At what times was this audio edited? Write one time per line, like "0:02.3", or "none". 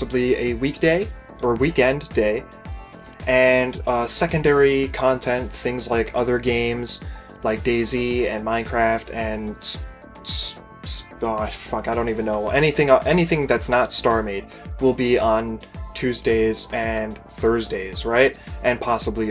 0:06.2